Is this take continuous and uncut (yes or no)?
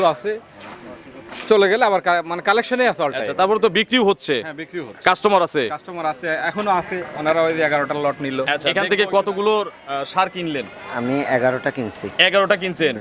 no